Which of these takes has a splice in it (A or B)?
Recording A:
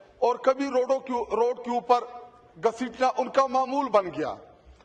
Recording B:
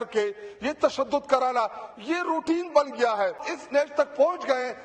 B